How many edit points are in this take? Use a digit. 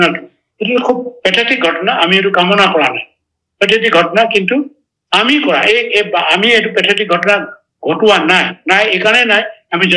0